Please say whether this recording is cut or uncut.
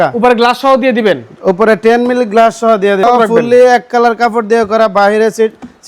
cut